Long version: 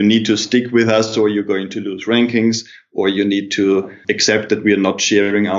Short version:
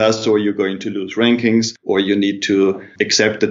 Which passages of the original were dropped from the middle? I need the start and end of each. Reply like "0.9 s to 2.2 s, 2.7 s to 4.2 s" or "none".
2.7 s to 2.8 s